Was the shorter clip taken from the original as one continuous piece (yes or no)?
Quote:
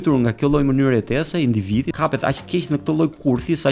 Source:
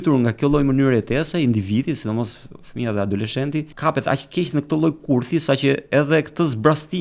no